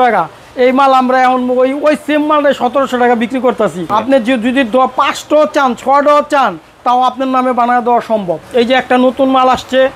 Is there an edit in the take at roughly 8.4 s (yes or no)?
yes